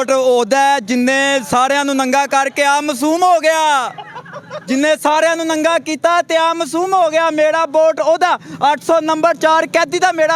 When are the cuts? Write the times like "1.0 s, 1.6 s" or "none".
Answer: none